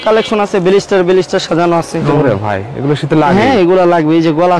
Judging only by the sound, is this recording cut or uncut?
cut